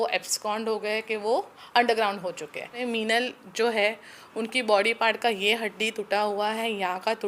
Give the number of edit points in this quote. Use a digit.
1